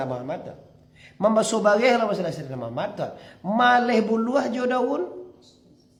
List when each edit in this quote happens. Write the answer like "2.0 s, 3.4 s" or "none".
none